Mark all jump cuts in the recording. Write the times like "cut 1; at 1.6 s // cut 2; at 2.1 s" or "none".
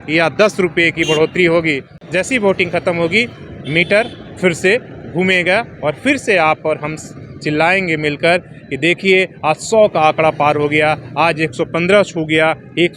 cut 1; at 1.9 s